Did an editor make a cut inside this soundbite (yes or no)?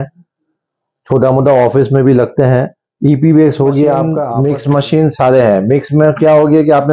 yes